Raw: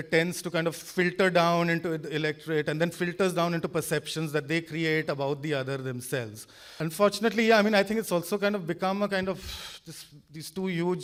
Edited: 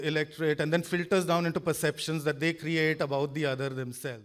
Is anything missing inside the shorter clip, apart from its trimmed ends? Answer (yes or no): no